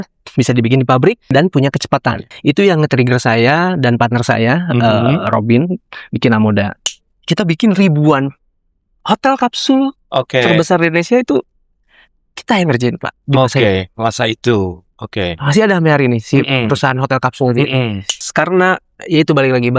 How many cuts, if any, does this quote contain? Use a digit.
4